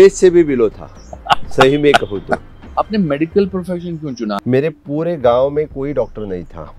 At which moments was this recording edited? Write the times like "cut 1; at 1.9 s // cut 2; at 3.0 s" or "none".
cut 1; at 2.6 s // cut 2; at 4.4 s

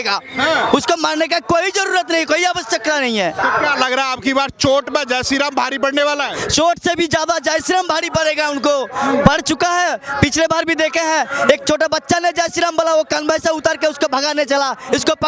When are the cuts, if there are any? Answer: none

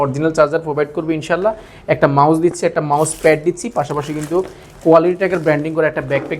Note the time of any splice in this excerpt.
none

